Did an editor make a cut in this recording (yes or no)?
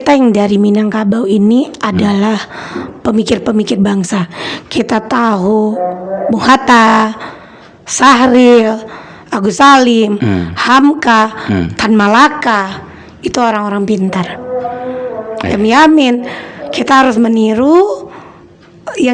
no